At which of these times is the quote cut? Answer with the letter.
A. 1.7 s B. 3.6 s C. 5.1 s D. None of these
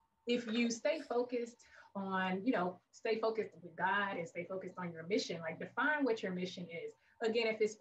D